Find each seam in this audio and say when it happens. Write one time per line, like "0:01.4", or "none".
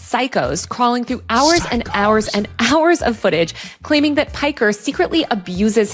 none